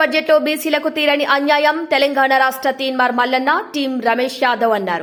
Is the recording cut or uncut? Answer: uncut